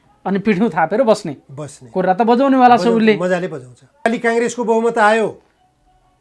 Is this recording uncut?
no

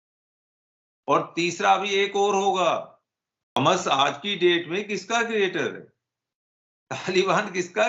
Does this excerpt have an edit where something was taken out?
yes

